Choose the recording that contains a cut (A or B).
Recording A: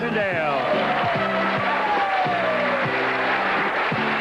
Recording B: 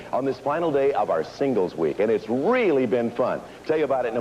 B